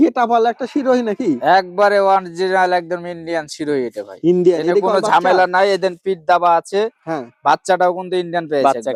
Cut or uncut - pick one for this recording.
uncut